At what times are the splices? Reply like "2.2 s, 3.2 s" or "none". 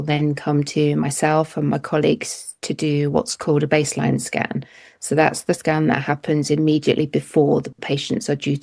none